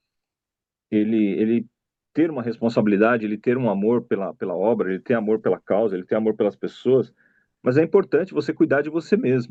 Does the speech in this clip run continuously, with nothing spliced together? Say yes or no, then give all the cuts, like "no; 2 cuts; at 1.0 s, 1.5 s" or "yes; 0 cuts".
yes; 0 cuts